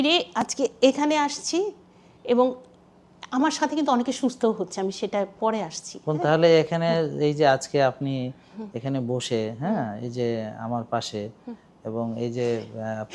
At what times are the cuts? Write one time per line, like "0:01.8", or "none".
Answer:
none

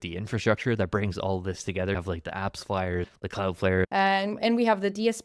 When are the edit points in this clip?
0:01.9
0:03.5

